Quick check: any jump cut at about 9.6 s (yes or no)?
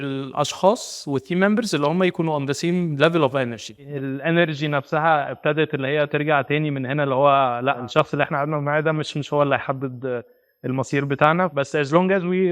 no